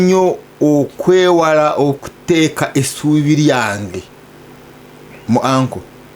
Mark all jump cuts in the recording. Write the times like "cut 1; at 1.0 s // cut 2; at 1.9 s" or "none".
none